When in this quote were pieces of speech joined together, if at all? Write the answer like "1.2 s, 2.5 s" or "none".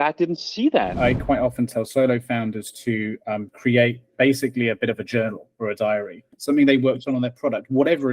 0.9 s, 6.2 s